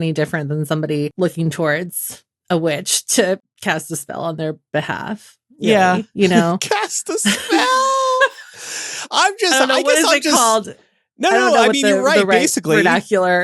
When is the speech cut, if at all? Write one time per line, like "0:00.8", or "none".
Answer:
0:01.1
0:03.5